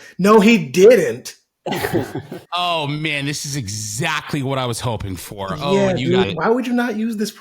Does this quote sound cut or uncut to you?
cut